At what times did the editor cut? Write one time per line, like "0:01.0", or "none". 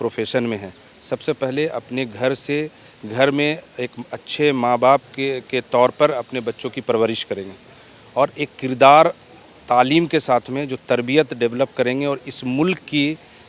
none